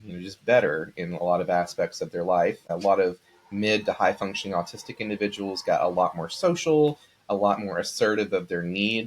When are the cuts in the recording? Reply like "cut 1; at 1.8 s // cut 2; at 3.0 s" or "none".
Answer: cut 1; at 2.7 s